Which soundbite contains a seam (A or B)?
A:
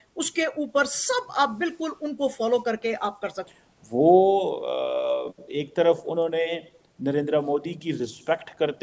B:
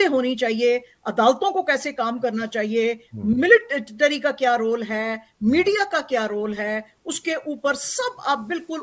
A